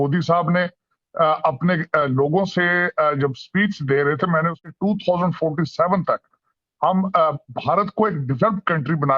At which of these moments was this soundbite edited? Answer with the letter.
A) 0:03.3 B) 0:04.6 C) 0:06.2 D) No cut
B